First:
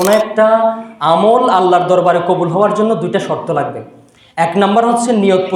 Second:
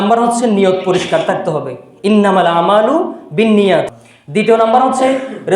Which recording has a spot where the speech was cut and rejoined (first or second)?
second